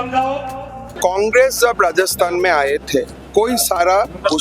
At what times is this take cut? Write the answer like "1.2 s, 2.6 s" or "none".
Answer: 0.9 s